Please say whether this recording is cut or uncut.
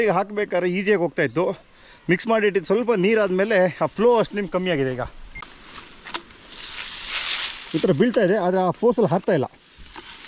cut